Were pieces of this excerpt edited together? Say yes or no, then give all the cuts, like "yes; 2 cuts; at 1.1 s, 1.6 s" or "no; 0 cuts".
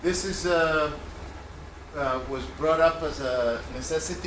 yes; 1 cut; at 3.1 s